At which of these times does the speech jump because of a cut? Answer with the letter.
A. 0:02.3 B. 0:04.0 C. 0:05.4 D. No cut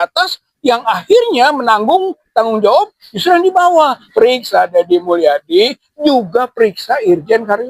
B